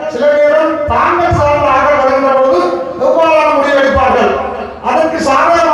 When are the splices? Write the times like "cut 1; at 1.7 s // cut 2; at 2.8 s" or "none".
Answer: none